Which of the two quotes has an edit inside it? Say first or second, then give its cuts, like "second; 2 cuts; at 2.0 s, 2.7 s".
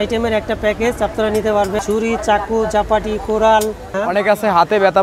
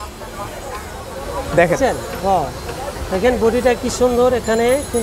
first; 2 cuts; at 1.8 s, 3.9 s